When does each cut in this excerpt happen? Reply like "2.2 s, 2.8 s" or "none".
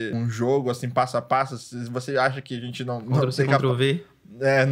none